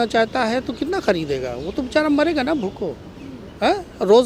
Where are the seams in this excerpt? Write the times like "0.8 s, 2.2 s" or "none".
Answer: none